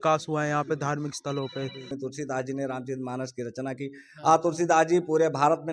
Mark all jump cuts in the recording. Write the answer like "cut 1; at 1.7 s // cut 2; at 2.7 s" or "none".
cut 1; at 1.9 s